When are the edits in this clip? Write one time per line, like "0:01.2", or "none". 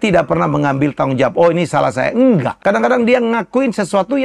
0:02.5